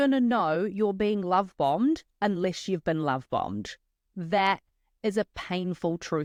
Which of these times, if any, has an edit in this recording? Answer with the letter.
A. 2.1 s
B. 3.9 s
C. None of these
C